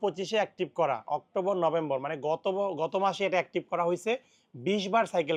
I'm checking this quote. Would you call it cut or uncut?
uncut